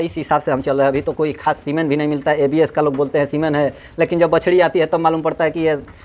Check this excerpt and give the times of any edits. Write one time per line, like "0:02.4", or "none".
none